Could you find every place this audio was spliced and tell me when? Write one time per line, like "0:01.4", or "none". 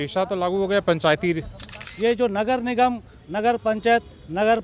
0:01.8